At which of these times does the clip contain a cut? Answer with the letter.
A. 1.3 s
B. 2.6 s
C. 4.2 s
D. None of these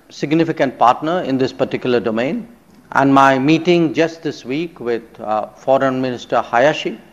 D